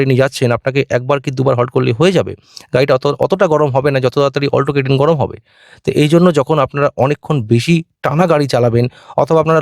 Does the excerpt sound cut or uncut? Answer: uncut